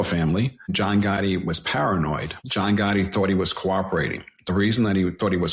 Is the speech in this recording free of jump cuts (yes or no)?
no